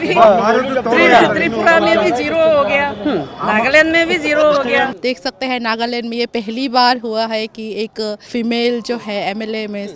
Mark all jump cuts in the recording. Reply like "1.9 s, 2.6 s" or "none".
4.9 s, 8.3 s